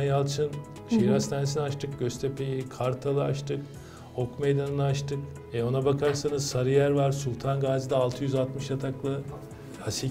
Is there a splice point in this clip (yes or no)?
no